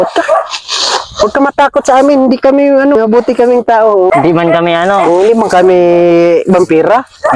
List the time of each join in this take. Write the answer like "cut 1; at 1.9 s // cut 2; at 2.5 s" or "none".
cut 1; at 3.0 s // cut 2; at 4.1 s